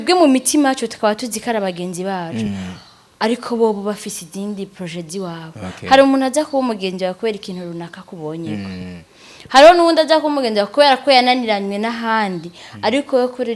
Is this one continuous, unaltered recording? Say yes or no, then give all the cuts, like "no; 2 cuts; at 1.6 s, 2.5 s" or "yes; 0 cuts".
yes; 0 cuts